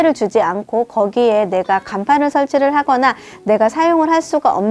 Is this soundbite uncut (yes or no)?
yes